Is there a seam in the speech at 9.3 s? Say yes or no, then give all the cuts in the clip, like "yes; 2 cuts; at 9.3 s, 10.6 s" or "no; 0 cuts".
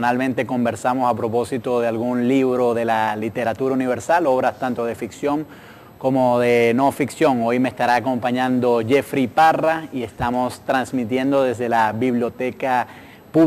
no; 1 cut; at 4.3 s